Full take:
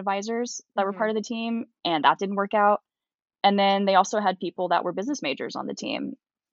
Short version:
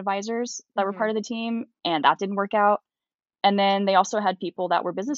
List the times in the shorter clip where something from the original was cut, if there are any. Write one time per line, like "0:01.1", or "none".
none